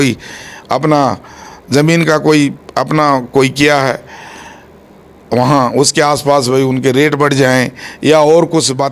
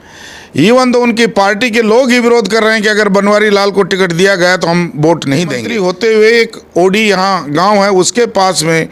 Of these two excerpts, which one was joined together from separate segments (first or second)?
second